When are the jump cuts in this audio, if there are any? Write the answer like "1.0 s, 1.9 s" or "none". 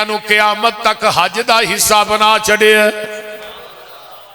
none